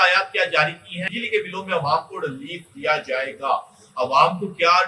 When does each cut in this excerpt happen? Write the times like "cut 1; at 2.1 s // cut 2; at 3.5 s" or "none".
cut 1; at 1.0 s